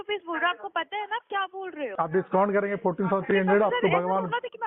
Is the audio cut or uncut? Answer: cut